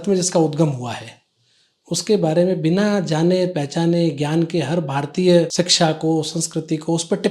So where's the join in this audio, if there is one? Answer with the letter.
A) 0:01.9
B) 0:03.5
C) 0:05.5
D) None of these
C